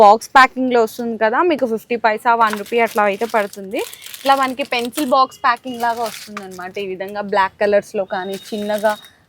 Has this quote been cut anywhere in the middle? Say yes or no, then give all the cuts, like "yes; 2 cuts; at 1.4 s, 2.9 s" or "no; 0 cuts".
no; 0 cuts